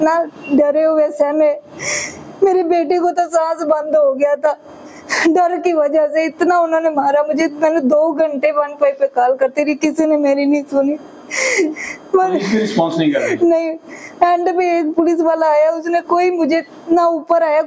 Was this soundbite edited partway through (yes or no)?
no